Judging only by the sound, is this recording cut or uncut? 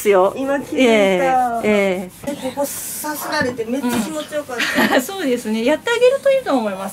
cut